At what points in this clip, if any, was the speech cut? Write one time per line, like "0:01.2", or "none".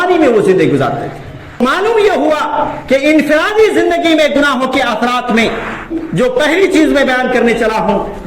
0:01.6